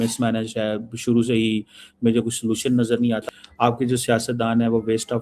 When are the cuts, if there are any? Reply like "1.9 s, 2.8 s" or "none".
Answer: 3.2 s